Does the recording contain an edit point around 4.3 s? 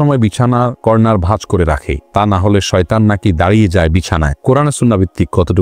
yes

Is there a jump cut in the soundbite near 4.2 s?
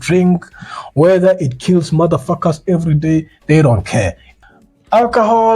yes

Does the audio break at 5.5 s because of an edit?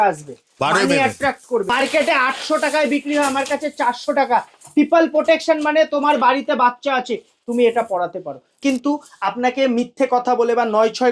no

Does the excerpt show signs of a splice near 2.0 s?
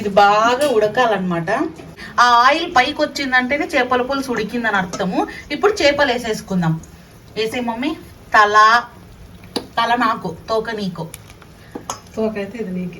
yes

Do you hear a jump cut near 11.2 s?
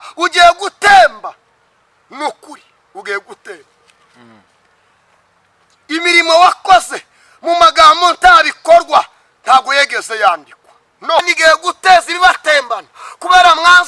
yes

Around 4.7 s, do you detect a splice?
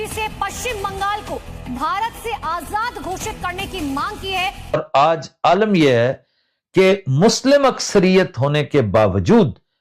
yes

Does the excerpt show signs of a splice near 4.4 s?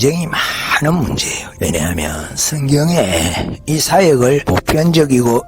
yes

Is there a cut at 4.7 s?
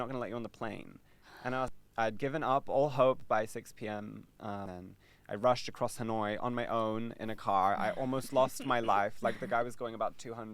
yes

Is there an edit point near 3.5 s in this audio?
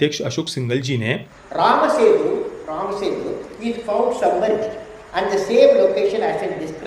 no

